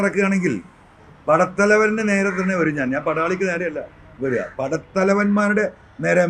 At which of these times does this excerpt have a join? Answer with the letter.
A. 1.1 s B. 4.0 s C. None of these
C